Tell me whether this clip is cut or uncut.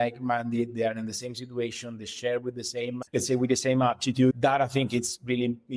uncut